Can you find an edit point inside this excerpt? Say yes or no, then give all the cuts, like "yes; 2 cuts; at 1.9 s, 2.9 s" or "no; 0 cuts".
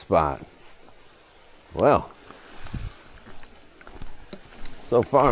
no; 0 cuts